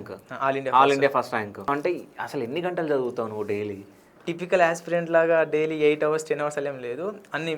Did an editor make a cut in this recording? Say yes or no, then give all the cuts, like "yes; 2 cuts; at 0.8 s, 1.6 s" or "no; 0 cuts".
yes; 2 cuts; at 1.7 s, 4.2 s